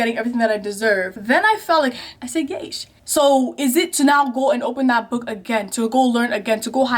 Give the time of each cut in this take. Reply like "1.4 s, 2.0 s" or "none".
2.2 s

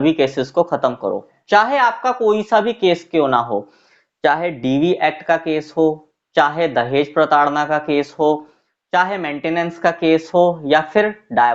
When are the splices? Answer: 1.3 s

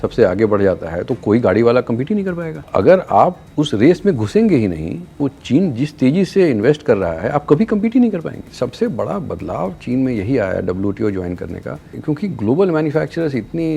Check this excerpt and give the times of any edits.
2.5 s, 3.4 s, 8.5 s, 12.0 s

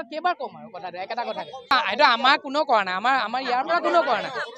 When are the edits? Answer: none

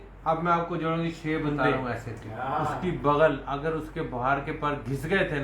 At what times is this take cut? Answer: 2.8 s

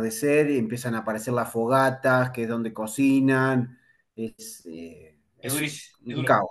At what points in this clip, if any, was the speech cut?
none

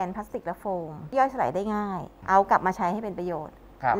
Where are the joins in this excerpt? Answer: 1.1 s, 2.1 s

